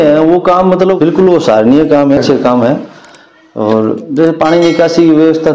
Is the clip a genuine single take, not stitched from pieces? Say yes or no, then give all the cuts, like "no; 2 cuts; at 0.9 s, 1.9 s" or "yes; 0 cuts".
no; 1 cut; at 2.2 s